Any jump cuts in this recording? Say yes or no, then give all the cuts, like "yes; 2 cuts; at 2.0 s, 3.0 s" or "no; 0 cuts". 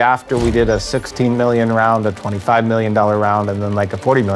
no; 0 cuts